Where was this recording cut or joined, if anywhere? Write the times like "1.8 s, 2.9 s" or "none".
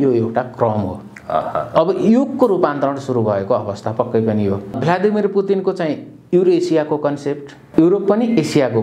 4.7 s, 7.6 s